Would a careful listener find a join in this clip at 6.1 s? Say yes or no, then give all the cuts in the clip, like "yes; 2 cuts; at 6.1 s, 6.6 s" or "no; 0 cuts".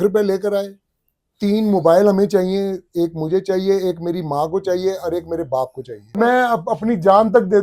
yes; 1 cut; at 6.1 s